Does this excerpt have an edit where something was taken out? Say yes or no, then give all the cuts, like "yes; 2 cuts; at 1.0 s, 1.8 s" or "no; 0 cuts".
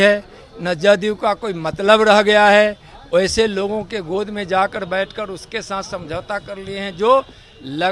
no; 0 cuts